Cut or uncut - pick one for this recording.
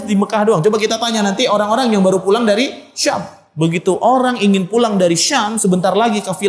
uncut